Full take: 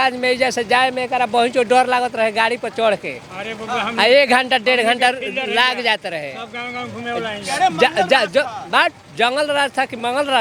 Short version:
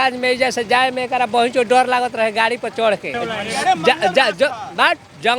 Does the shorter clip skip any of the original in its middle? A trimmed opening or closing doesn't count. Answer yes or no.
yes